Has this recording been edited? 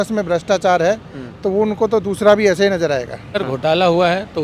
yes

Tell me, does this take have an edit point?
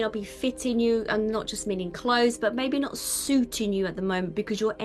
no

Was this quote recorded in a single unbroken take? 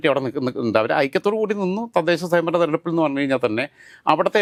yes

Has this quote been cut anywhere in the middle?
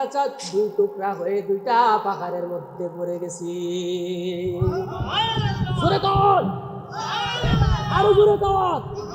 no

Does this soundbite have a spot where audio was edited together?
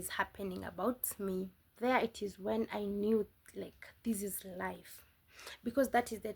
yes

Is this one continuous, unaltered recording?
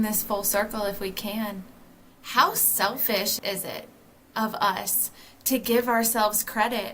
no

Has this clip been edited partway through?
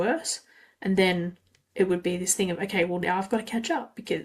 no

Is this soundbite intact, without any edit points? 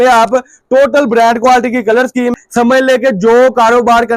no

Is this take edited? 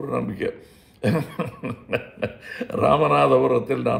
no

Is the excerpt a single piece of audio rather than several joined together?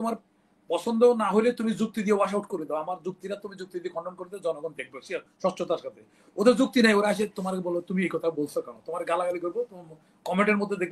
yes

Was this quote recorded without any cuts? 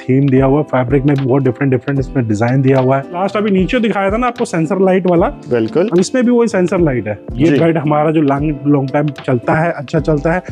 no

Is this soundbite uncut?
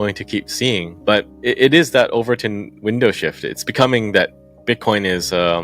no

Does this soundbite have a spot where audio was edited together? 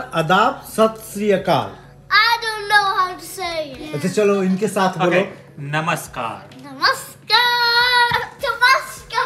no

